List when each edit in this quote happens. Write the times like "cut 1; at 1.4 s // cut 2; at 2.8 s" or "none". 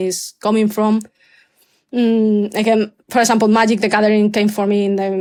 none